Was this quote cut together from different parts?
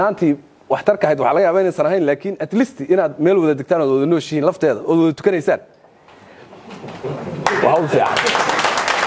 no; 0 cuts

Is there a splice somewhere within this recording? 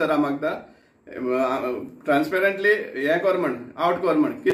no; 0 cuts

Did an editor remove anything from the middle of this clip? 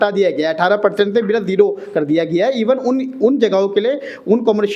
no; 0 cuts

